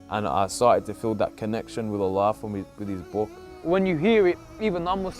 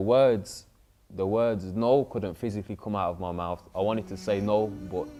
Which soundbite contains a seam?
first; 1 cut; at 3.5 s

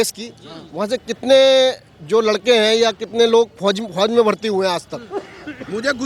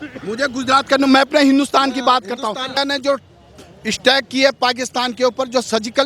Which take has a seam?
second; 1 cut; at 2.8 s

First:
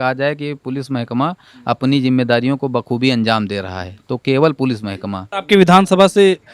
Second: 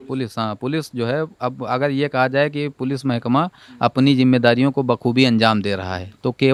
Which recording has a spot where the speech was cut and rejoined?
first; 1 cut; at 5.3 s

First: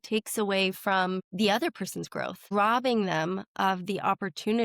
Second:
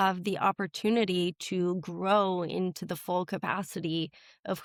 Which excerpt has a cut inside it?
first; 2 cuts; at 1.3 s, 2.5 s

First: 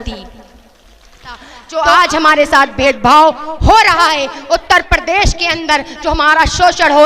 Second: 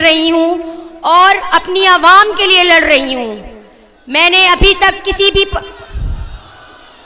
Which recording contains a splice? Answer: first; 1 cut; at 1.5 s

